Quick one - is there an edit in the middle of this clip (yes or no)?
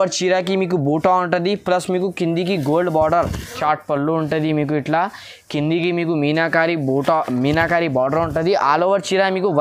yes